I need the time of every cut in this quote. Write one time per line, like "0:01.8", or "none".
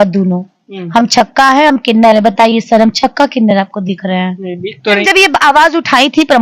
0:05.0